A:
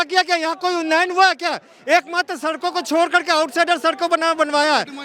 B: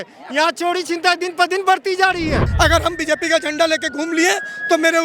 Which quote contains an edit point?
B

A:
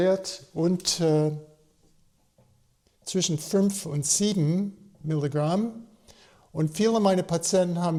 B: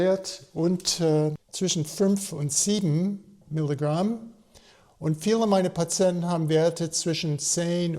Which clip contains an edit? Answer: B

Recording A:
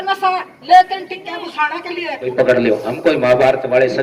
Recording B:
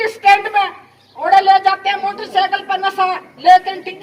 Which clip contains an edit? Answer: A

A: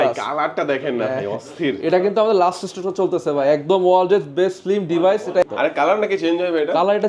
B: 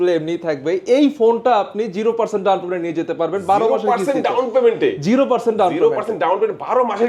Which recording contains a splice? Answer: A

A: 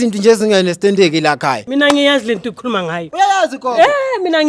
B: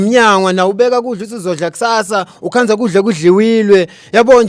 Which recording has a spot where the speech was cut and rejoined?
A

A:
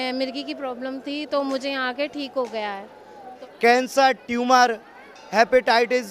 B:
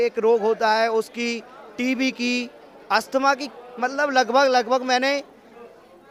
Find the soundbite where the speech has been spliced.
A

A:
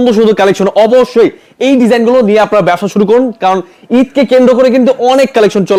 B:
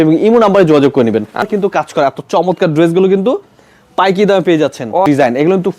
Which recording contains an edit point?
B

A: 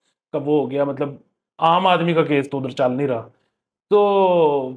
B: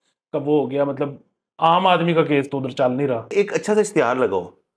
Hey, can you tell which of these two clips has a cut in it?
B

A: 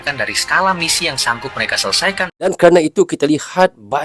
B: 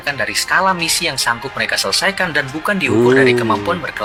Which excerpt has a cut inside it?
A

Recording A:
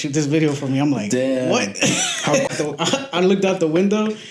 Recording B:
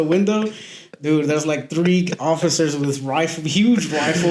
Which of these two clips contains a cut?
A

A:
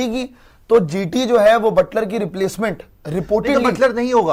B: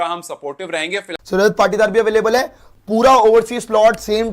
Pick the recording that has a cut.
B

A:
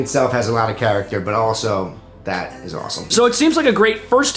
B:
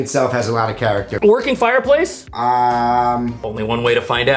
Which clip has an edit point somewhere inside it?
B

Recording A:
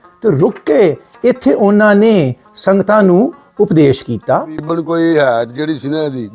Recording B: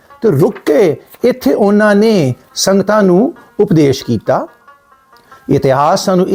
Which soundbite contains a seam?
A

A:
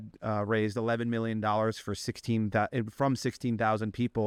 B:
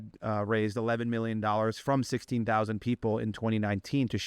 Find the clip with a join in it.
B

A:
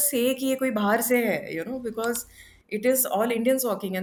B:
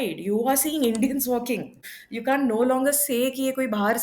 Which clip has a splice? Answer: B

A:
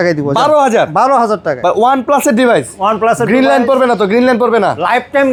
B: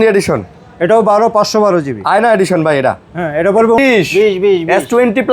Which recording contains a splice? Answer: B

